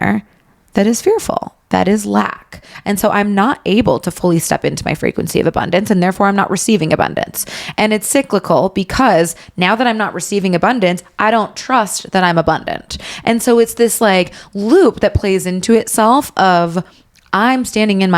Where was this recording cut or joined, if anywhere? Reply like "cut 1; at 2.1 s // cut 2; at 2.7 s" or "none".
none